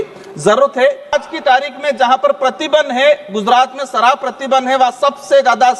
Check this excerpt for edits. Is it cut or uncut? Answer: cut